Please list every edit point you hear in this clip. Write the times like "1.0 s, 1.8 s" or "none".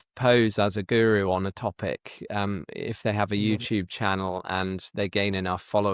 none